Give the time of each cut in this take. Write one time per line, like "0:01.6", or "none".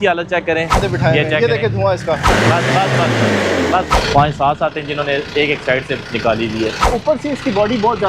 0:00.8
0:02.3
0:03.9
0:06.9